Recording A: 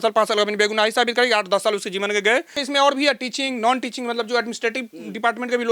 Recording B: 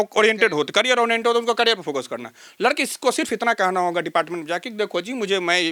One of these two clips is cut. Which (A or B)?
A